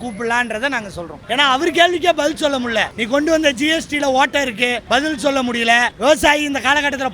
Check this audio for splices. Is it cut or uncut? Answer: cut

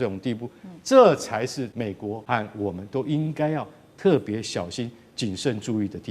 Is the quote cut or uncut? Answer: cut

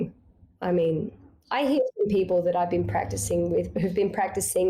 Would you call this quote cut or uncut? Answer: cut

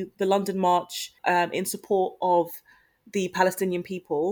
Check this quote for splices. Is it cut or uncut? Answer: cut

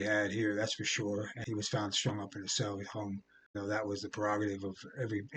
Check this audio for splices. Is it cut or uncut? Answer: cut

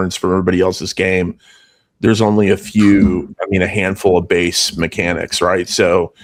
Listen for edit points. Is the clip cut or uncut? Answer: uncut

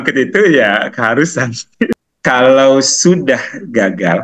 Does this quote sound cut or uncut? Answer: cut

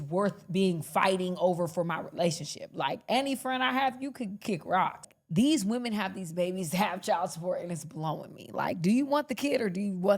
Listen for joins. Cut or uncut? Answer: cut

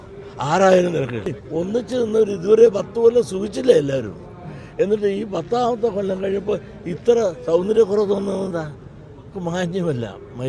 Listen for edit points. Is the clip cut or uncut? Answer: cut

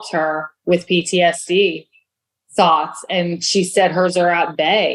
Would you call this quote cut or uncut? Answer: uncut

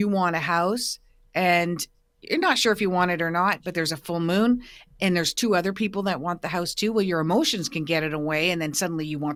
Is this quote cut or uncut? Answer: uncut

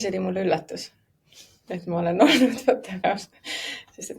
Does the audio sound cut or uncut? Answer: cut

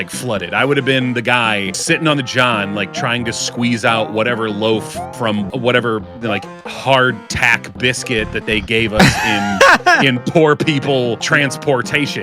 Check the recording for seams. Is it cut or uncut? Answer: cut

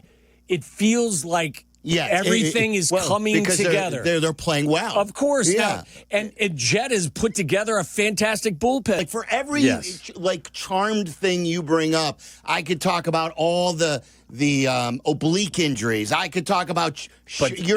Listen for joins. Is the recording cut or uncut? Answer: cut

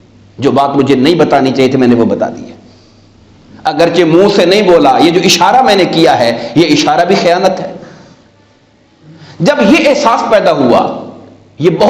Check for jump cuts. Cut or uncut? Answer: uncut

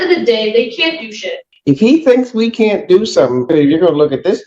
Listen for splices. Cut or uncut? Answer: cut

